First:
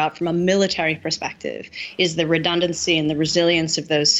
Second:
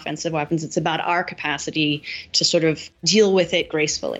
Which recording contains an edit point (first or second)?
second